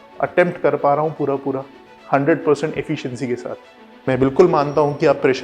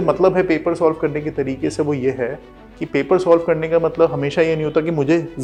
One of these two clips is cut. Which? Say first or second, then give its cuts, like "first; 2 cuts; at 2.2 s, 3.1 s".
first; 1 cut; at 3.9 s